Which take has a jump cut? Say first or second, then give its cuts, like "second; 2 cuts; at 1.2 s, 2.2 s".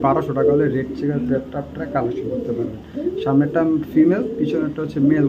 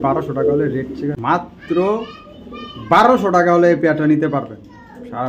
second; 1 cut; at 1.2 s